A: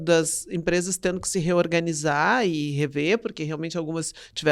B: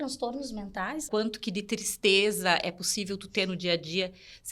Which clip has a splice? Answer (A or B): B